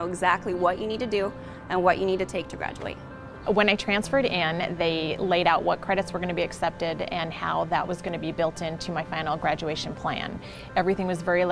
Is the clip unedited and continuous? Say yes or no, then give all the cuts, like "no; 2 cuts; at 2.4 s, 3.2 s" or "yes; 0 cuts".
no; 1 cut; at 1.1 s